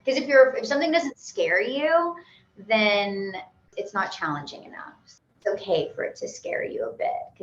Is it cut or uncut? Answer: cut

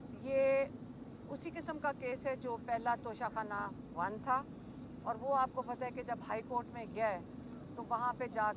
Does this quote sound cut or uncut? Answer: uncut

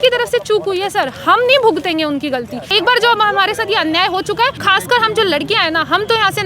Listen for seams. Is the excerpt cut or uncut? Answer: cut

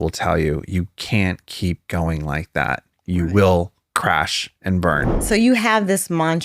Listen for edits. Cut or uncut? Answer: cut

